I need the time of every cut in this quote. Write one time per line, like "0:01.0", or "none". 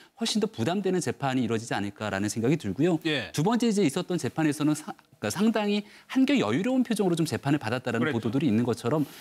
0:05.2